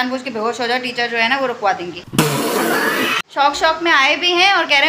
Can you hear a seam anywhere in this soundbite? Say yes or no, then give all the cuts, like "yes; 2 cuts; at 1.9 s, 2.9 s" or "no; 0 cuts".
no; 0 cuts